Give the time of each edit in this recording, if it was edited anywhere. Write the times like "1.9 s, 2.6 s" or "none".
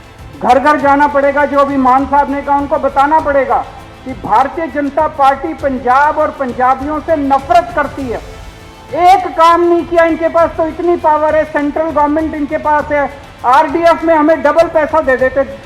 none